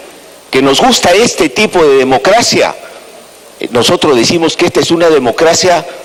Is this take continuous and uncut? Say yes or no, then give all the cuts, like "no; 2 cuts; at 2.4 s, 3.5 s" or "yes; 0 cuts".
yes; 0 cuts